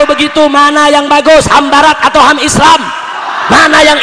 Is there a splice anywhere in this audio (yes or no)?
no